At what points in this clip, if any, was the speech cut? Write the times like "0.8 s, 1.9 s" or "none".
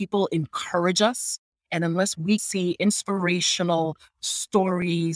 2.4 s